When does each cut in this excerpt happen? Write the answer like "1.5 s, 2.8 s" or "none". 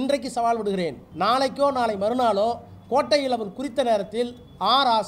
1.0 s